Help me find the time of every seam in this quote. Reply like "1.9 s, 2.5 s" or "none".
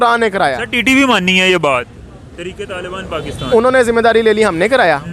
none